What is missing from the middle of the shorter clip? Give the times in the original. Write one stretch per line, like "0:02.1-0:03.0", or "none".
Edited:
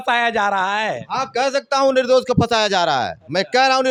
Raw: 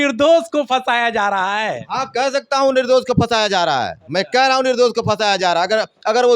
none